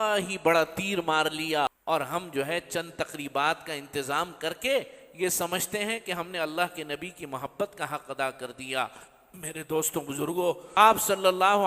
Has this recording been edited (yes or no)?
yes